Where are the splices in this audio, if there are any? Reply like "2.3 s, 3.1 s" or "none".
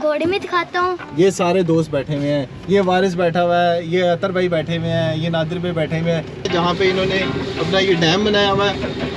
1.0 s, 6.5 s